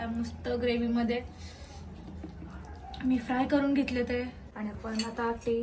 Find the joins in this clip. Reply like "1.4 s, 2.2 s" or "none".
4.4 s